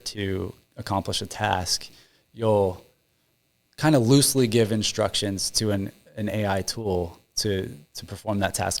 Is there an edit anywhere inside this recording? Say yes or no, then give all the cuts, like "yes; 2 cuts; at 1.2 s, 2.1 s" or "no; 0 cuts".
no; 0 cuts